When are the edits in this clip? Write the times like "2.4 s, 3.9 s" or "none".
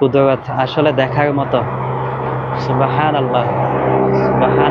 none